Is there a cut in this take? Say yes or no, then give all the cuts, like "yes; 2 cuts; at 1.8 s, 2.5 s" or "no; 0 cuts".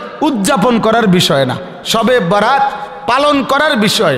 no; 0 cuts